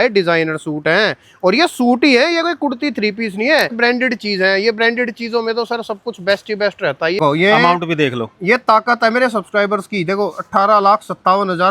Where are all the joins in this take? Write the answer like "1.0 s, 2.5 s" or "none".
3.8 s, 7.2 s